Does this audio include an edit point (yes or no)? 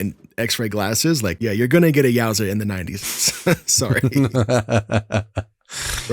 yes